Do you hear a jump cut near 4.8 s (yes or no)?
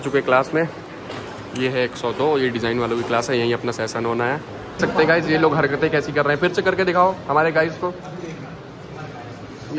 yes